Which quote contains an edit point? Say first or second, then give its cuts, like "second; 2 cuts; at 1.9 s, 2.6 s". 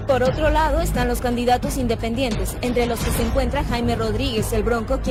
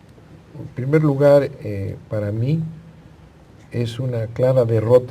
second; 1 cut; at 2.9 s